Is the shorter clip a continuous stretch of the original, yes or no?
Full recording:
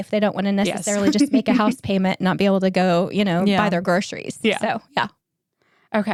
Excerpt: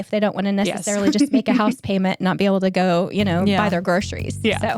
yes